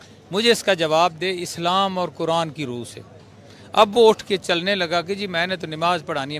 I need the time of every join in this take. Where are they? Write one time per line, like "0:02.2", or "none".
none